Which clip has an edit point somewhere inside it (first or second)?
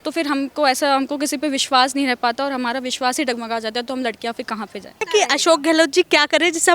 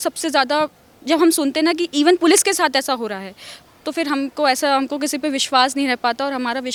first